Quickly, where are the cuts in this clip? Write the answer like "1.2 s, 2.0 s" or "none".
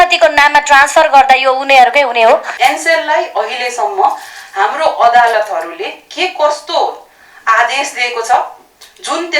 2.5 s